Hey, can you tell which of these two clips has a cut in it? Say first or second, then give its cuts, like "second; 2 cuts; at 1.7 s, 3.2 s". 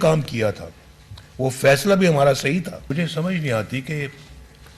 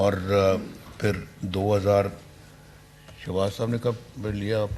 first; 1 cut; at 2.9 s